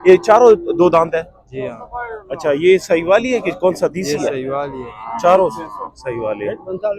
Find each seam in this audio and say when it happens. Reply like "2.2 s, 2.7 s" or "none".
none